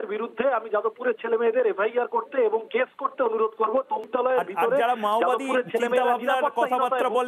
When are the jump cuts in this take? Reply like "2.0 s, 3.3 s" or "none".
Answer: 4.0 s